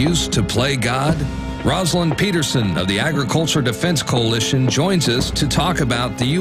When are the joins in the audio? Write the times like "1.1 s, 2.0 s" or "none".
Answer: 3.8 s